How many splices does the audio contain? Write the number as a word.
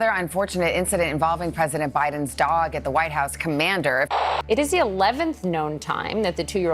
zero